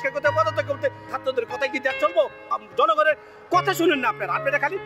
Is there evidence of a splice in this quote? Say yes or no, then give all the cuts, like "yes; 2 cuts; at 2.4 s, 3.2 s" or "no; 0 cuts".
yes; 2 cuts; at 1.1 s, 2.5 s